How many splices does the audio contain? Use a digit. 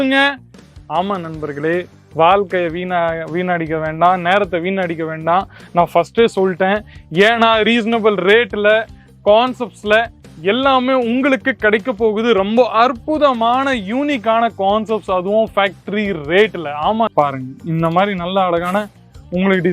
1